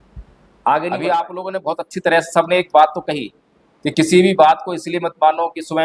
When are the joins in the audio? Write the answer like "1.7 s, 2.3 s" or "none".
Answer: 1.3 s